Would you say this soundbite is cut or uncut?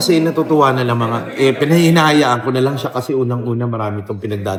uncut